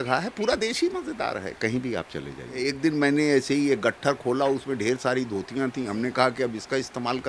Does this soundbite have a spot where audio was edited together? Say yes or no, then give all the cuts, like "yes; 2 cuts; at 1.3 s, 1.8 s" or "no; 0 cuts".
yes; 1 cut; at 2.7 s